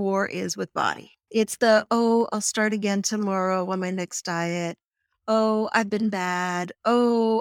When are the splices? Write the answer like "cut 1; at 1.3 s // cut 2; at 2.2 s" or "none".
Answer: cut 1; at 1.2 s